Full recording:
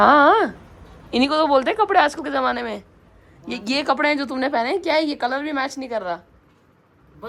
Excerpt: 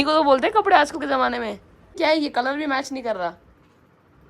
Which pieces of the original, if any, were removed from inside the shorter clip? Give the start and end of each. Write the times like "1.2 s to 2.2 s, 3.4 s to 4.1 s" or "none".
3.2 s to 4.8 s